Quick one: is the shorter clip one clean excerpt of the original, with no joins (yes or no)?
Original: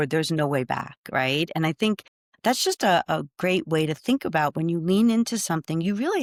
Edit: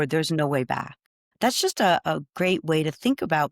no